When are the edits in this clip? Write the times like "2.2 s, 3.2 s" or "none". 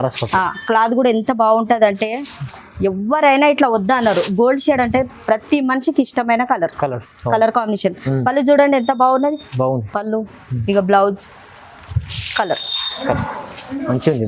none